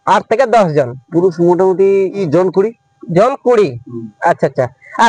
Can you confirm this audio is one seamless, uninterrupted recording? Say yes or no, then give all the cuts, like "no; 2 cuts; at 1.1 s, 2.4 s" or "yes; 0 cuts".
no; 2 cuts; at 1.0 s, 2.3 s